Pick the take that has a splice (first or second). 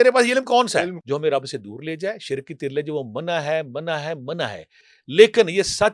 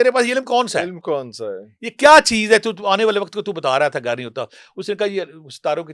first